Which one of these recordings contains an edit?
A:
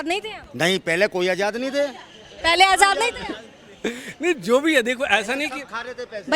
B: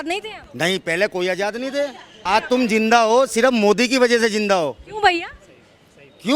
B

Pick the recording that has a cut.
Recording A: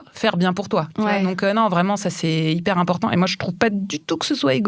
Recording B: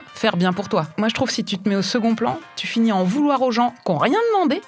B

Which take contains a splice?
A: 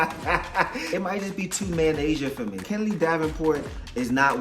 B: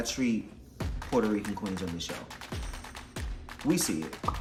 A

